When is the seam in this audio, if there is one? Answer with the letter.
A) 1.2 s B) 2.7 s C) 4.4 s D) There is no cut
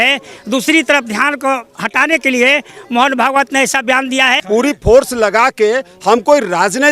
C